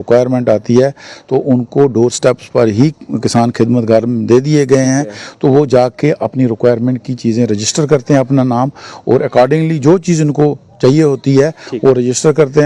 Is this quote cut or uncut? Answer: uncut